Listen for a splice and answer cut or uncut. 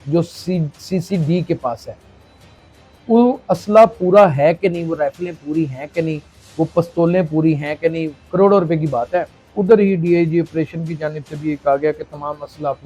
cut